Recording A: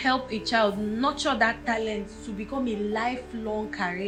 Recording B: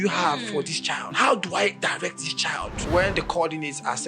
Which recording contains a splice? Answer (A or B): B